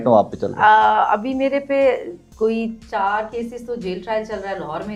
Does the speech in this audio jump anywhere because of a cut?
no; 0 cuts

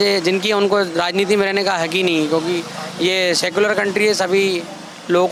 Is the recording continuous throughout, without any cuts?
yes; 0 cuts

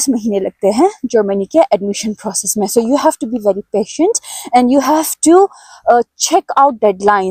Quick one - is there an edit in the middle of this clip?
no; 0 cuts

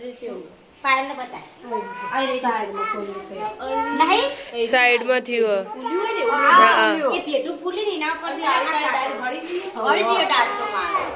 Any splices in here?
no; 0 cuts

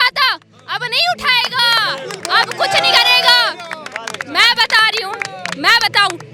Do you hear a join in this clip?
no; 0 cuts

